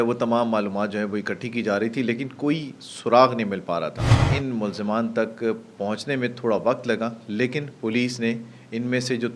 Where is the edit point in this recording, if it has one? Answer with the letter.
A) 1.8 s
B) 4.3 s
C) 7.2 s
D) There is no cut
B